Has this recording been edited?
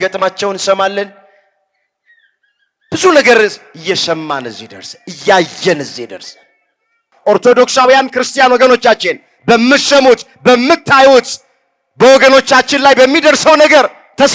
yes; 1 cut; at 7.1 s

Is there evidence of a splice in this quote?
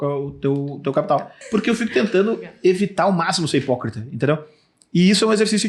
yes; 1 cut; at 1.4 s

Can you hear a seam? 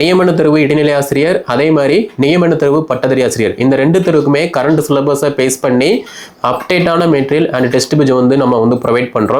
no; 0 cuts

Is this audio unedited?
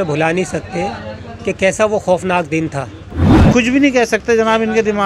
no; 1 cut; at 3.3 s

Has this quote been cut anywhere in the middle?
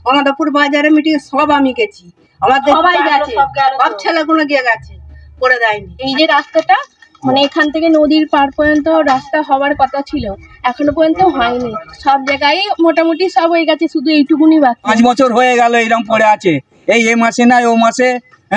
yes; 3 cuts; at 2.7 s, 6.0 s, 14.9 s

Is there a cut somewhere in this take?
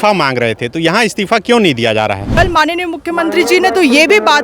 yes; 1 cut; at 2.4 s

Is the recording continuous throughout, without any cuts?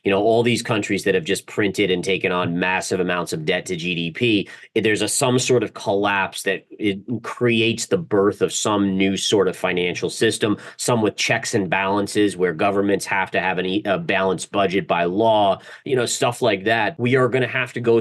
no; 1 cut; at 16.9 s

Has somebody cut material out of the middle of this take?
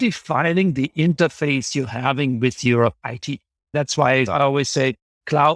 no; 0 cuts

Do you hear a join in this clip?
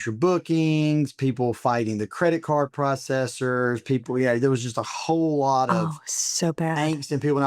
no; 0 cuts

